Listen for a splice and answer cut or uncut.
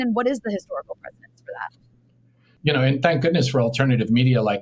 cut